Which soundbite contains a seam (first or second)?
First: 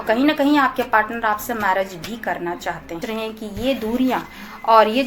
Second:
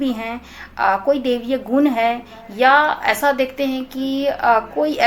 first